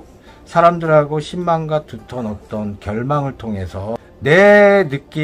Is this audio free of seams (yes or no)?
yes